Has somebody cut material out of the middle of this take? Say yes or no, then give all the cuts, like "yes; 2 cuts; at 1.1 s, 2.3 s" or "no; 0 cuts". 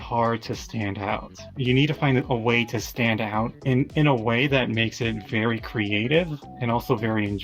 yes; 2 cuts; at 1.5 s, 3.6 s